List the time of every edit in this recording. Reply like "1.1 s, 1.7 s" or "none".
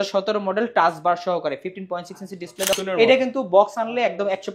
2.7 s